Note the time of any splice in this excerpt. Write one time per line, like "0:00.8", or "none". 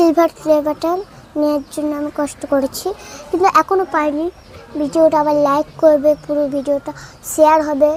none